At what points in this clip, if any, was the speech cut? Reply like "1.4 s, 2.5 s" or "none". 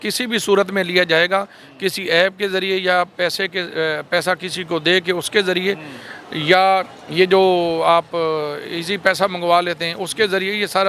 none